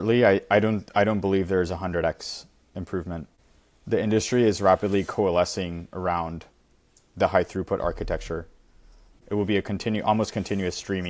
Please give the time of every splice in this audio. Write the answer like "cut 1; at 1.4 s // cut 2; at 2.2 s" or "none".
cut 1; at 3.4 s // cut 2; at 9.1 s